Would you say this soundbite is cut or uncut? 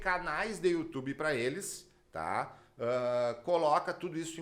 uncut